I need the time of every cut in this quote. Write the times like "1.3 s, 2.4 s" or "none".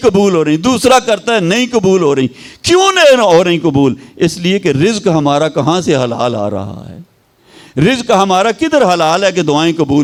none